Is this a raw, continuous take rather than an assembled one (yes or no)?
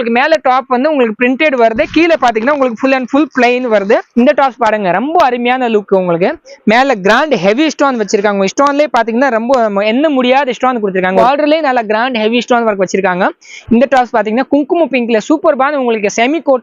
no